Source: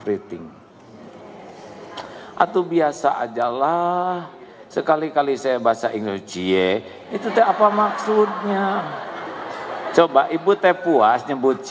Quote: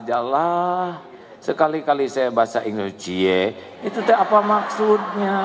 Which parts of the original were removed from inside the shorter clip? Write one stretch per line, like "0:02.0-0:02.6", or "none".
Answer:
none